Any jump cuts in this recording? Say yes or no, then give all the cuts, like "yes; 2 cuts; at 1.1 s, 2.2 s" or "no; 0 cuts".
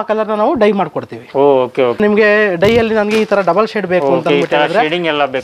yes; 1 cut; at 2.0 s